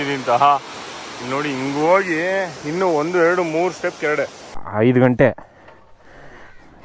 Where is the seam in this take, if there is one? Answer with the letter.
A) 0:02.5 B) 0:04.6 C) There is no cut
B